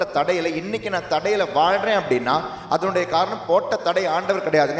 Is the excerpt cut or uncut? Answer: uncut